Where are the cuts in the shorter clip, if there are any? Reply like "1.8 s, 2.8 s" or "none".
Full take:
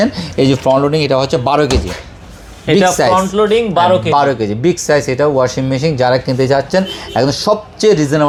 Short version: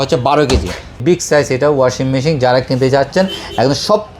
0.9 s